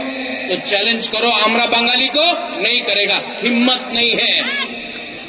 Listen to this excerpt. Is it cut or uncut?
uncut